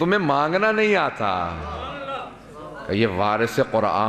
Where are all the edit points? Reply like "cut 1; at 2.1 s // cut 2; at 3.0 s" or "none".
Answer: none